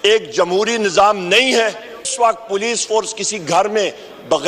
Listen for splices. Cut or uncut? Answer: cut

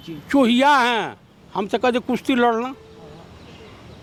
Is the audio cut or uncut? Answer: uncut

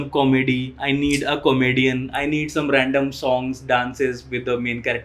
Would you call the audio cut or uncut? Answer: uncut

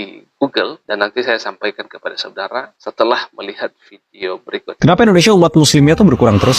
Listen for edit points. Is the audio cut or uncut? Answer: cut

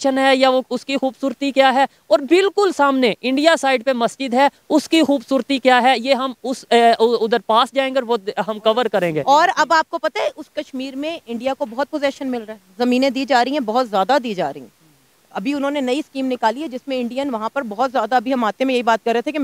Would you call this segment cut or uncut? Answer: cut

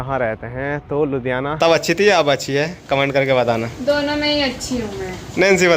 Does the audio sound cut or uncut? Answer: cut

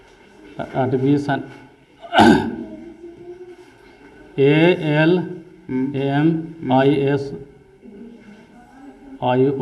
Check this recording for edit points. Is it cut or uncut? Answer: uncut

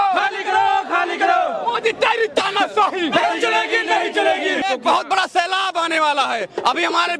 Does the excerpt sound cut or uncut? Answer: cut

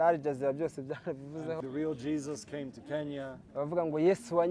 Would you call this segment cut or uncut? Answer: cut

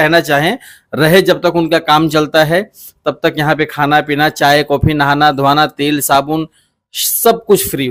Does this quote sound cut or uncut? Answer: uncut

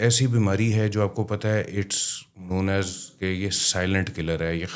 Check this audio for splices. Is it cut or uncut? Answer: uncut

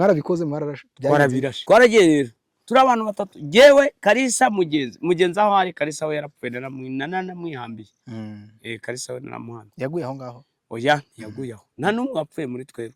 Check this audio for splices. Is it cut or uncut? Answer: cut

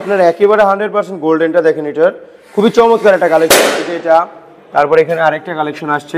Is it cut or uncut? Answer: uncut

